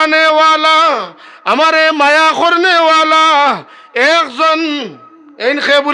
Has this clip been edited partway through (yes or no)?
no